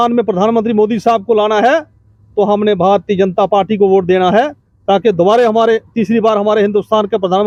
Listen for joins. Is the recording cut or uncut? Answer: uncut